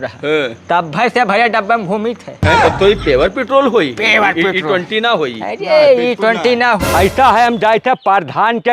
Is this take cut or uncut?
cut